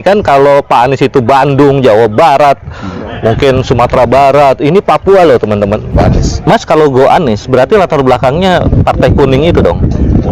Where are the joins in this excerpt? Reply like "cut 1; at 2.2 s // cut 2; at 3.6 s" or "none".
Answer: cut 1; at 5.9 s